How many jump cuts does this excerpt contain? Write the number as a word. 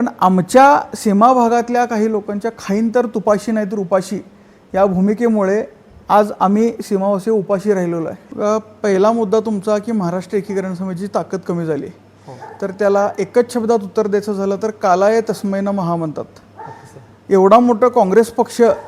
one